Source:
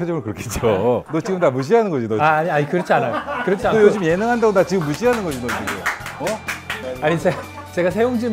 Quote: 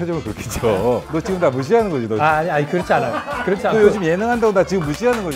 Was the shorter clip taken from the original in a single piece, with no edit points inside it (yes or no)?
yes